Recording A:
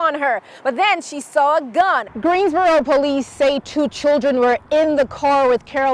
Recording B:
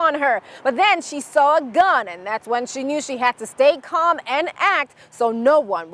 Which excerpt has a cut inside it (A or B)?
A